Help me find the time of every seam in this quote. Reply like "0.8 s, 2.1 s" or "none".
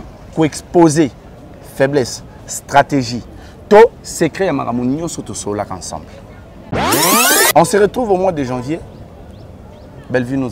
7.0 s